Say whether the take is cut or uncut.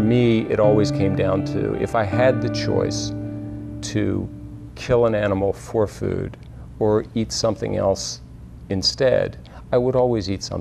uncut